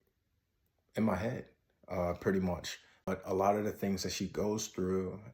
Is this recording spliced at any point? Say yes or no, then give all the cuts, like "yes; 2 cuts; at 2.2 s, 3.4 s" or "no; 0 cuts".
yes; 1 cut; at 3.1 s